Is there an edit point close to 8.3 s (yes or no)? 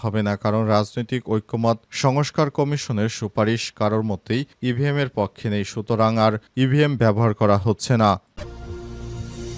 yes